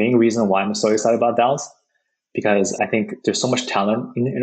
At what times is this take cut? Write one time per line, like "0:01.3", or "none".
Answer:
0:02.8